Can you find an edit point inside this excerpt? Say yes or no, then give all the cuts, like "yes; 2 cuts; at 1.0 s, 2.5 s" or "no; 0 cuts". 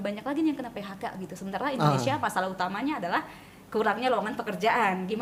no; 0 cuts